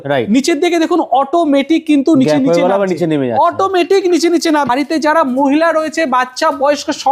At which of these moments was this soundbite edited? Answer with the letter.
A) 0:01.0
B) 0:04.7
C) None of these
B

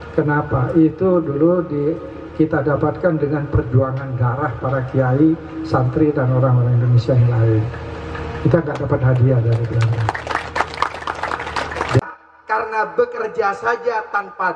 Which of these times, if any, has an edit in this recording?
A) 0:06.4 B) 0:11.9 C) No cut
B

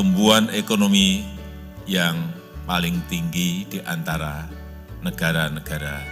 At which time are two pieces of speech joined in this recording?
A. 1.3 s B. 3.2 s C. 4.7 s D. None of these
D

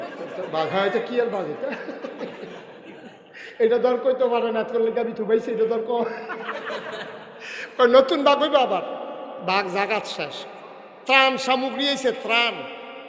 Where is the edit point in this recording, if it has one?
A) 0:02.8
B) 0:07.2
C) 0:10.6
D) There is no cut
C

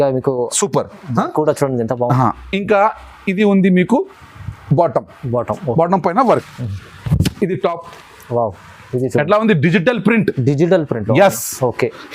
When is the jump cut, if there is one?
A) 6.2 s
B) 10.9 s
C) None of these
A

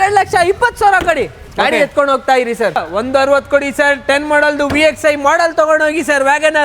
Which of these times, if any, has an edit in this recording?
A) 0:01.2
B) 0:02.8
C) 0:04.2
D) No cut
B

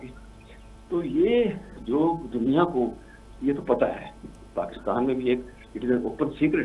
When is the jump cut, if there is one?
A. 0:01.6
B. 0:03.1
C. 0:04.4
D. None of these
D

